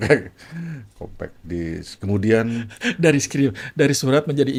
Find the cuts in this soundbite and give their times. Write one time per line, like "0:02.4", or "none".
none